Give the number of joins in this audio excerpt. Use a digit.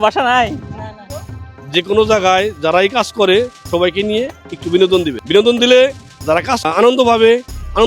3